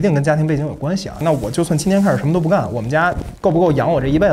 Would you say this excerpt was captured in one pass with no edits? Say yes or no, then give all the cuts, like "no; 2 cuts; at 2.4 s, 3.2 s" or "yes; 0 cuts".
no; 1 cut; at 3.3 s